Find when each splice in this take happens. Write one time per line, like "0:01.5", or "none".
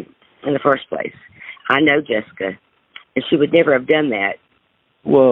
0:04.3

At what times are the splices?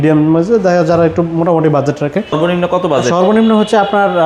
0:02.3

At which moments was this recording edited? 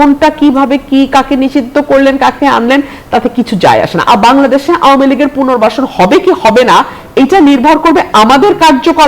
0:04.1

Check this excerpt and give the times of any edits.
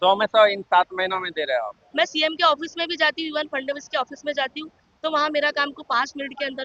0:01.8

